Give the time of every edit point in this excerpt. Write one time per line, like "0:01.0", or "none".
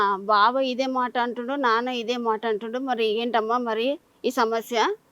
none